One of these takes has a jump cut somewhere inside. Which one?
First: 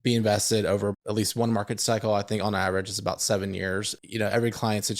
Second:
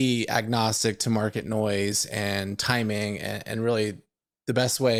first; 2 cuts; at 0.9 s, 3.9 s

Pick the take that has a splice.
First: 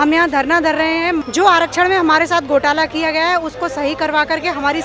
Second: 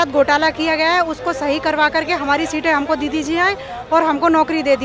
first; 1 cut; at 1.2 s

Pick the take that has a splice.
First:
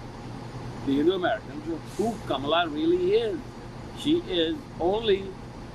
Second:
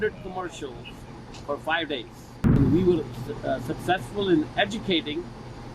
second; 1 cut; at 2.6 s

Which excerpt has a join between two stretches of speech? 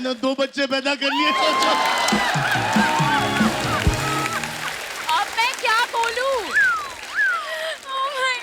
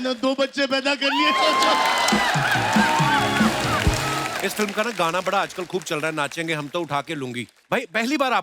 second; 1 cut; at 4.2 s

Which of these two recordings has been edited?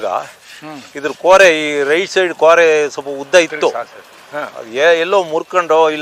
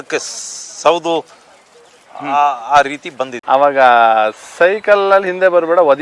second; 1 cut; at 3.3 s

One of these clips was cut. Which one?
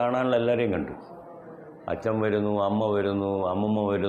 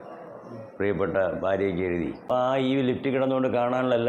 second; 1 cut; at 2.2 s

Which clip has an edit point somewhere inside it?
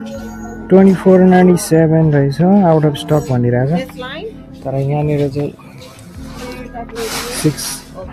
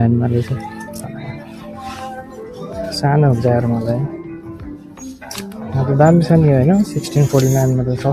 second; 1 cut; at 0.9 s

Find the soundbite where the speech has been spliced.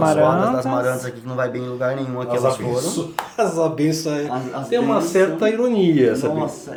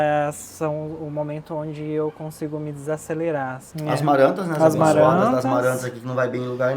second; 1 cut; at 3.7 s

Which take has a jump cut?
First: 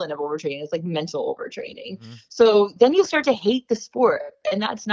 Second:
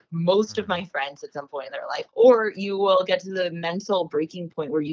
second; 1 cut; at 2.1 s

